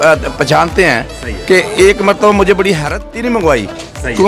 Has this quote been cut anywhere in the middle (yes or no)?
yes